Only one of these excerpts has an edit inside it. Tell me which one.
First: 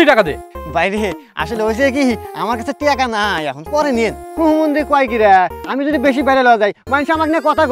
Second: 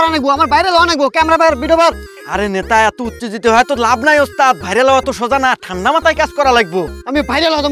first; 1 cut; at 4.2 s

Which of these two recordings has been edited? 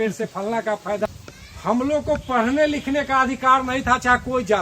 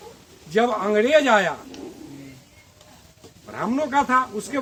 first; 1 cut; at 1.1 s

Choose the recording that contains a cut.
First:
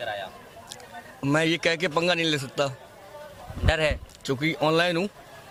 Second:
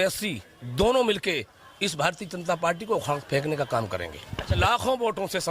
second; 1 cut; at 4.6 s

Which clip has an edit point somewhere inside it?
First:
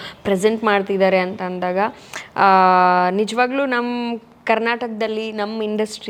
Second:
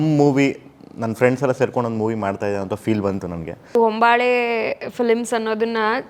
second; 1 cut; at 3.7 s

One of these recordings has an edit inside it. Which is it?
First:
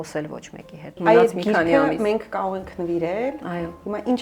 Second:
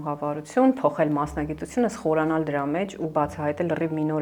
first; 1 cut; at 0.9 s

